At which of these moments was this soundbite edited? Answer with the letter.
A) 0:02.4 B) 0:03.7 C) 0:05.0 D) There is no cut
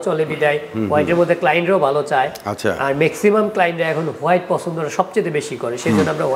D